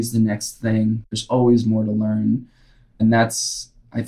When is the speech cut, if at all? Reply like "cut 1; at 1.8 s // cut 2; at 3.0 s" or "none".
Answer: cut 1; at 1.2 s // cut 2; at 3.0 s

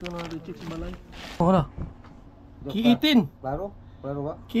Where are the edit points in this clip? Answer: cut 1; at 1.4 s

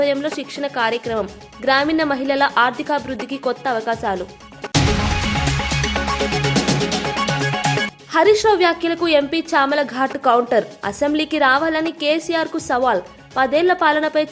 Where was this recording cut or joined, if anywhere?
none

